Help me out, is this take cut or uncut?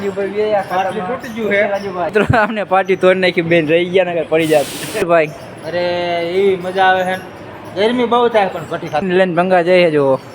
cut